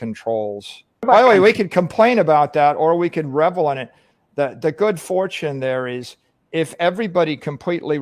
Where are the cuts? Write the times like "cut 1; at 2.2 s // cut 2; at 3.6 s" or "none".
cut 1; at 1.1 s